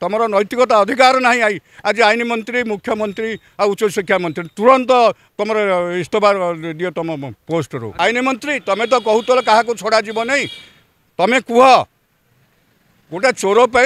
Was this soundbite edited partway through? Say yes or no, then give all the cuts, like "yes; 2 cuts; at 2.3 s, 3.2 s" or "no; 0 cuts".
yes; 1 cut; at 7.8 s